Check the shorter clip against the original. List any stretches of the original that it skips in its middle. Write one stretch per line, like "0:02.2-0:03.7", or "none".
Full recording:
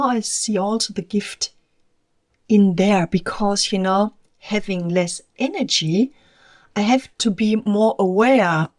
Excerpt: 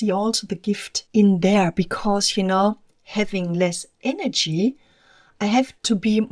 0:01.4-0:02.3